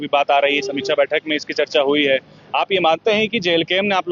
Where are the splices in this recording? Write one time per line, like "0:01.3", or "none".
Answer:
none